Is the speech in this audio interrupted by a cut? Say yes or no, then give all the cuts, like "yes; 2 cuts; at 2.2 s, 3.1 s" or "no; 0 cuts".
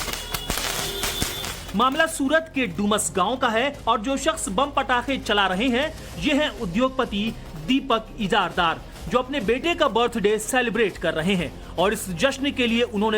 yes; 1 cut; at 8.6 s